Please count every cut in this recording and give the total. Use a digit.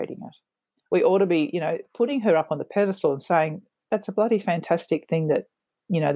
0